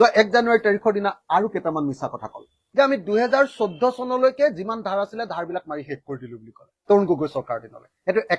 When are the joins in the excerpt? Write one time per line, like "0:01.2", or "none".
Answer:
none